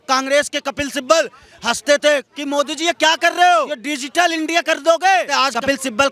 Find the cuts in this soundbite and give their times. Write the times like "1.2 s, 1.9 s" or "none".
3.8 s, 5.3 s